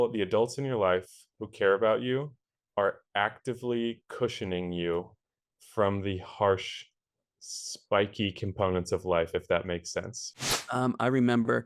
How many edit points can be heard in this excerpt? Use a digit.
1